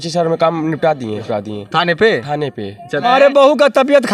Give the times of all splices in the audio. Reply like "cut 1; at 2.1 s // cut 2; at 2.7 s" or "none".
cut 1; at 1.2 s // cut 2; at 3.0 s